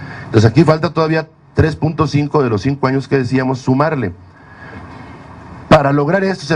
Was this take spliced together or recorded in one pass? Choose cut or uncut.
uncut